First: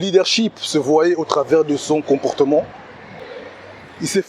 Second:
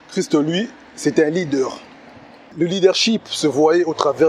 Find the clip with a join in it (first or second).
first